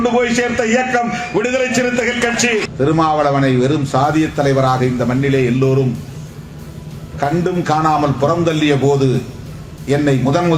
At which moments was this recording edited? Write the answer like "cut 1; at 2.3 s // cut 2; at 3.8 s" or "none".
cut 1; at 2.7 s